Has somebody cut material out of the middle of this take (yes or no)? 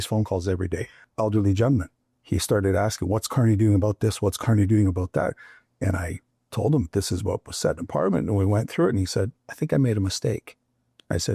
yes